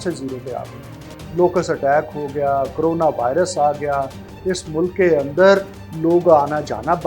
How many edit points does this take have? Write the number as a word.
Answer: zero